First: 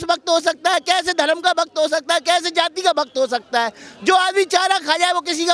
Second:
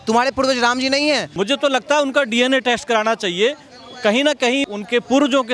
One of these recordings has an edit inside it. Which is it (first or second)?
second